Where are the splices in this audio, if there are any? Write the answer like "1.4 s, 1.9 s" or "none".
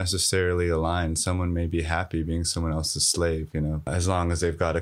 3.9 s

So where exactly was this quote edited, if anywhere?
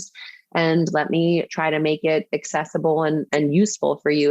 3.3 s

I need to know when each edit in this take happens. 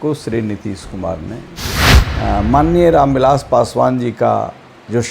2.0 s

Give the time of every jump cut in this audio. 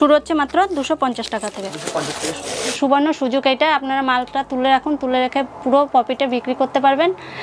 2.7 s

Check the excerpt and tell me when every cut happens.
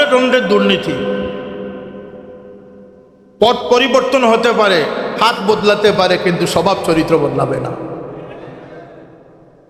none

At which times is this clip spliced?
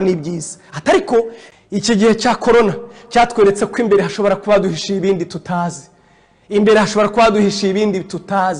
1.4 s

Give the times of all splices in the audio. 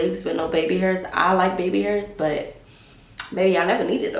none

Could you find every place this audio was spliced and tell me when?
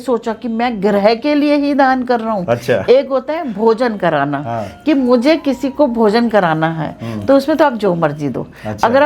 none

